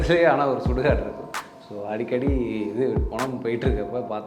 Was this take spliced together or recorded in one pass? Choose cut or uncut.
uncut